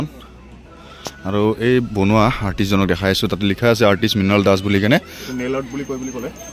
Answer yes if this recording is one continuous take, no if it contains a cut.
no